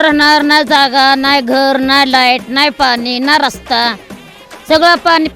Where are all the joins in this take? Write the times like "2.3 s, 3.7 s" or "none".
none